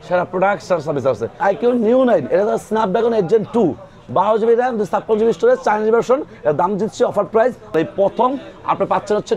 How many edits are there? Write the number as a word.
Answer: two